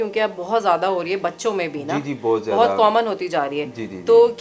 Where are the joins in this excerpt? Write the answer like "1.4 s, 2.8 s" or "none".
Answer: none